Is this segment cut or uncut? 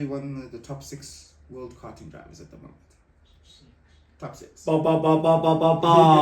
uncut